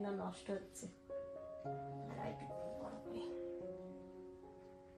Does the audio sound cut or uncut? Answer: uncut